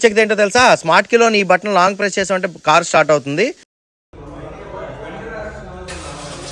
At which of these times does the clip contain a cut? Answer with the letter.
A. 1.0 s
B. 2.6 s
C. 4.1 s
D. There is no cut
D